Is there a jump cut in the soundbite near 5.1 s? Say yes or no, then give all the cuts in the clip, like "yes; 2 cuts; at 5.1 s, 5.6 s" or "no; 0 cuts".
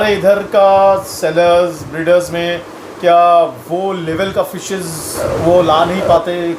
yes; 1 cut; at 5.1 s